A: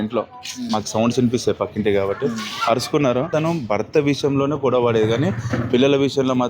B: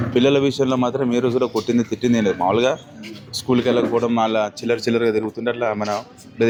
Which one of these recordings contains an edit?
A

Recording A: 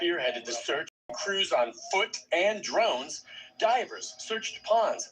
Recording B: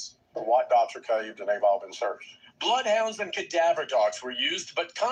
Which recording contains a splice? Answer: A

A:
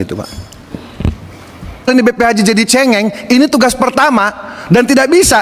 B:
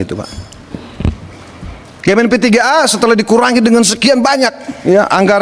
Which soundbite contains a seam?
A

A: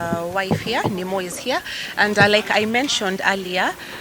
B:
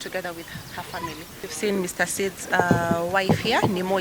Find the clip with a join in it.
B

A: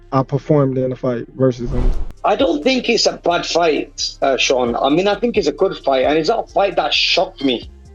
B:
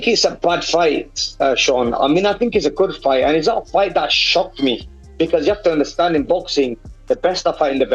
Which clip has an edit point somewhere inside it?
A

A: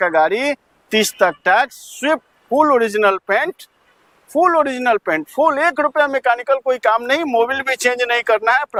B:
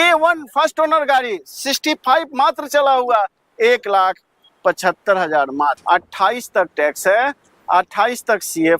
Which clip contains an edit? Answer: B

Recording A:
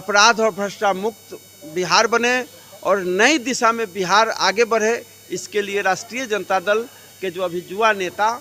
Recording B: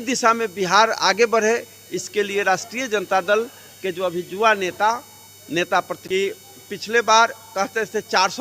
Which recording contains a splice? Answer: B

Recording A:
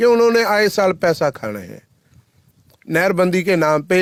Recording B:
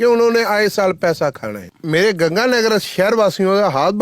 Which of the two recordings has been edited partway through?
B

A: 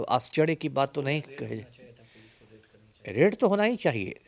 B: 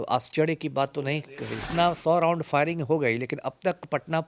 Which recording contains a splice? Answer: B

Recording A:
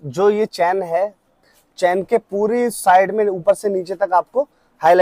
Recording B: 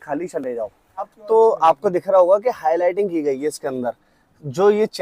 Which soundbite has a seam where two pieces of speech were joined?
B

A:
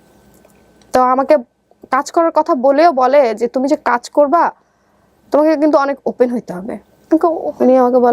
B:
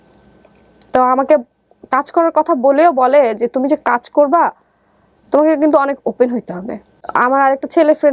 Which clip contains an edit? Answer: A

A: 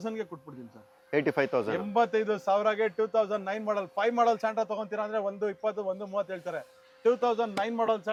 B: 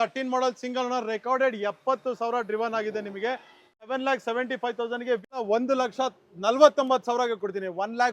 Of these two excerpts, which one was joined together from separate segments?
B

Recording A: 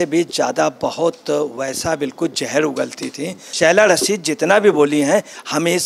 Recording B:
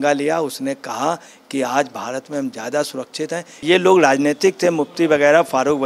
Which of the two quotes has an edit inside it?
B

